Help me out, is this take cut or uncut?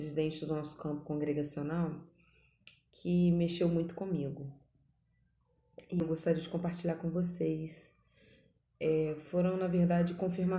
cut